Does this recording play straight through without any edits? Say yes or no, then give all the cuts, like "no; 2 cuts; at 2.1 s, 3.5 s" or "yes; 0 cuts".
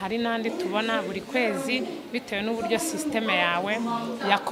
yes; 0 cuts